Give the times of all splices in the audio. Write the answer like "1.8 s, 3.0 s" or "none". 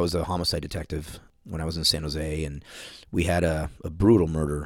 1.2 s